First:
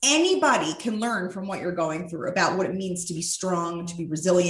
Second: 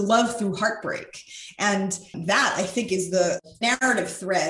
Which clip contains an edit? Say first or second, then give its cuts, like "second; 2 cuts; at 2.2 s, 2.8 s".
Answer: second; 2 cuts; at 2.2 s, 3.6 s